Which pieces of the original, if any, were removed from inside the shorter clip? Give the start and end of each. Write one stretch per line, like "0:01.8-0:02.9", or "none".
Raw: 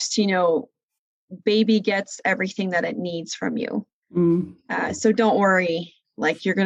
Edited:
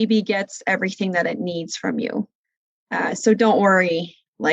0:04.2-0:04.4